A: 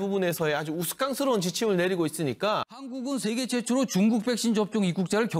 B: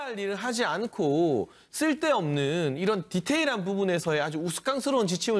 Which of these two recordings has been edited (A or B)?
A